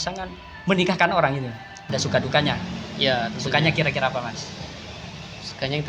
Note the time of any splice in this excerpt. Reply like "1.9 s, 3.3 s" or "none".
1.8 s